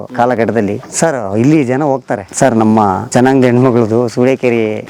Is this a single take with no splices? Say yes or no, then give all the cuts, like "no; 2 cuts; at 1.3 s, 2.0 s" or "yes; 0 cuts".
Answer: yes; 0 cuts